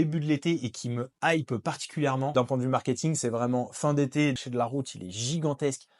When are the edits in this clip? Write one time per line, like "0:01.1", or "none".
0:02.3
0:04.4